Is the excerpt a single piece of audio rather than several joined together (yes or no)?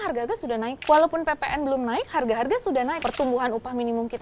no